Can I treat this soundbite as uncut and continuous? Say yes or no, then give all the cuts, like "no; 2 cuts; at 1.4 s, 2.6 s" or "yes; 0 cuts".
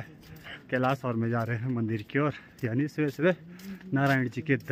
yes; 0 cuts